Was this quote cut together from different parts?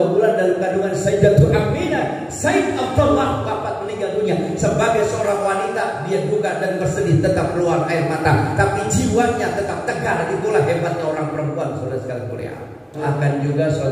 yes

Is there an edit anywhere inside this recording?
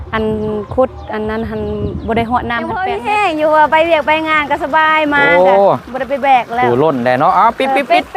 yes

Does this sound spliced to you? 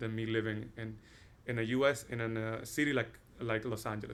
no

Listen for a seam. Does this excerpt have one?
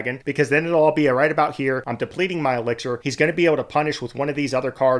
yes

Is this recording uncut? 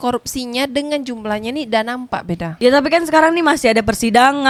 yes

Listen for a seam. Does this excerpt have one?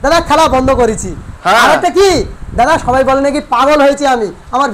no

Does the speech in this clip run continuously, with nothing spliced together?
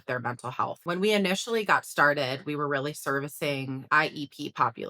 no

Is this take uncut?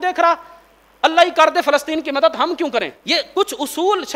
no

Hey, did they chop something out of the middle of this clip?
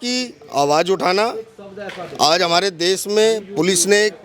no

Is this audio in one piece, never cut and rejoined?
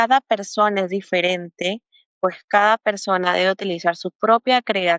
yes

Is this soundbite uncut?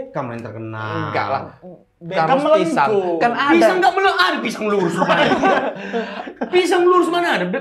yes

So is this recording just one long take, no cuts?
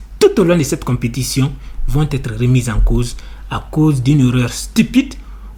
yes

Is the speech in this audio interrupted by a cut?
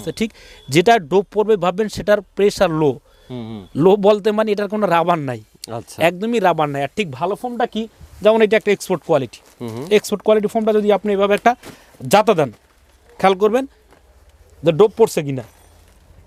no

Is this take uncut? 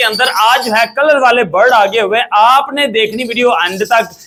yes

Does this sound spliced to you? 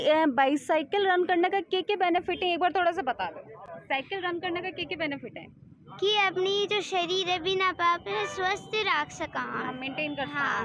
no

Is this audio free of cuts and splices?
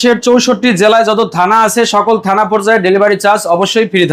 yes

